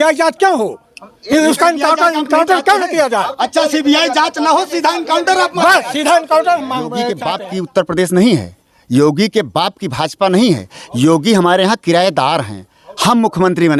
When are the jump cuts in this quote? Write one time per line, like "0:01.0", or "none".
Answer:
0:07.1